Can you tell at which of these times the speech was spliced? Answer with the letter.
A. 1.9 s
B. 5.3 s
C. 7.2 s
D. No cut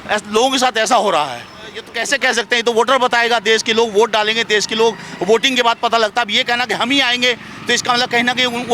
A